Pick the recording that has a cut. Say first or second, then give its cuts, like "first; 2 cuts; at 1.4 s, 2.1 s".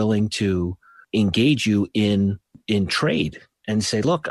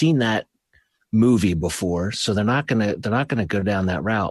first; 2 cuts; at 0.9 s, 2.6 s